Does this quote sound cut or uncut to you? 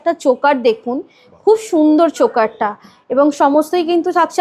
uncut